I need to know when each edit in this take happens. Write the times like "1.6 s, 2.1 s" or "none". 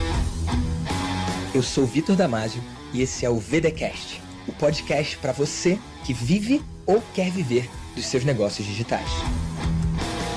none